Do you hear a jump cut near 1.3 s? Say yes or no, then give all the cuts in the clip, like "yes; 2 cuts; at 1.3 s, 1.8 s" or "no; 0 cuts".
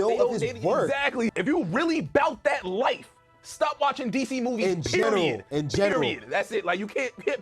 yes; 1 cut; at 1.3 s